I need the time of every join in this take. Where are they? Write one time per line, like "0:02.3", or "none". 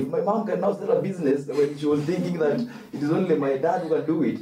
none